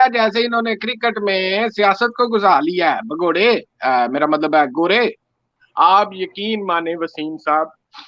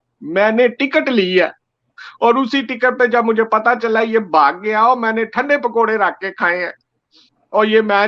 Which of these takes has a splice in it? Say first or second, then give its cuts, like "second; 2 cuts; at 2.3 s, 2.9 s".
first; 1 cut; at 5.6 s